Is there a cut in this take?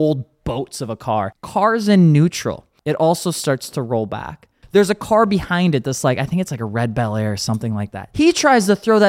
yes; 4 cuts; at 1.4 s, 2.7 s, 4.6 s, 8.0 s

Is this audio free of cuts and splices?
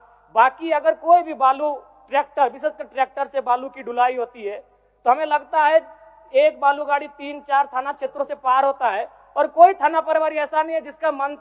yes; 0 cuts

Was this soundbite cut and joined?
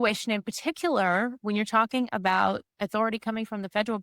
yes; 1 cut; at 2.7 s

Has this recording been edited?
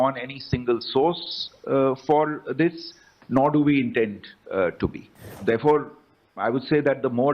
yes; 1 cut; at 5.2 s

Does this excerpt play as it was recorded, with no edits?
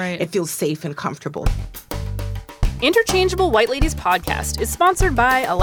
no; 1 cut; at 1.4 s

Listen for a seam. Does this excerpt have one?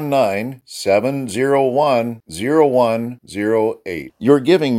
no; 0 cuts

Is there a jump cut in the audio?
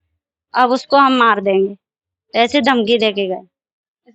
no; 0 cuts

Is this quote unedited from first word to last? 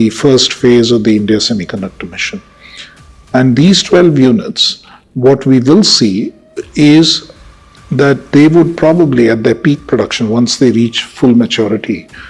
yes; 0 cuts

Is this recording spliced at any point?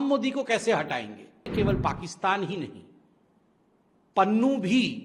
yes; 1 cut; at 1.5 s

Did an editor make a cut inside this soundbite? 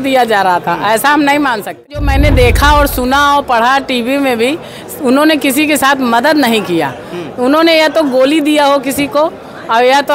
yes; 1 cut; at 2.1 s

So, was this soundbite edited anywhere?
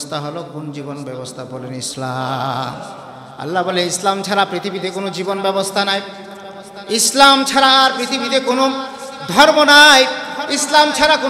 no; 0 cuts

